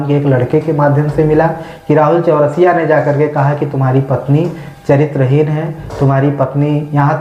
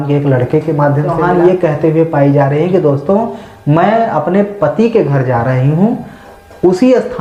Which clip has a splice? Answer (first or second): second